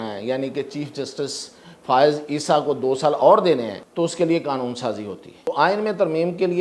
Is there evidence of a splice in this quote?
yes; 2 cuts; at 3.8 s, 5.5 s

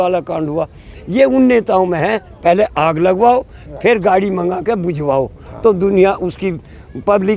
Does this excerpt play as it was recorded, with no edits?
yes; 0 cuts

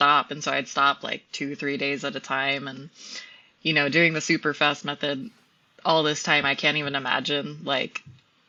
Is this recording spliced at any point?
no; 0 cuts

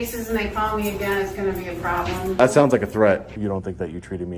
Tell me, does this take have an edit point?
yes; 2 cuts; at 2.3 s, 3.4 s

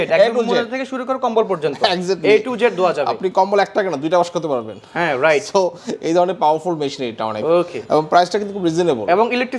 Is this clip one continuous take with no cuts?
yes; 0 cuts

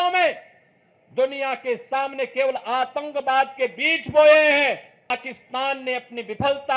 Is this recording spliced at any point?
yes; 1 cut; at 5.1 s

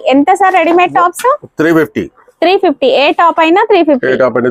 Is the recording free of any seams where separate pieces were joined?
yes; 0 cuts

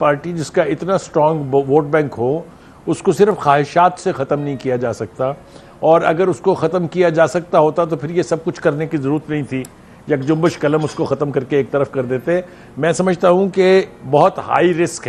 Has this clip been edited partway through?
no; 0 cuts

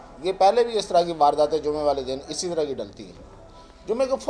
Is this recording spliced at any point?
no; 0 cuts

